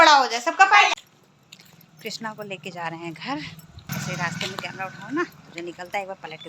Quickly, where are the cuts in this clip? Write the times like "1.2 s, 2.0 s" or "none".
0.9 s, 3.9 s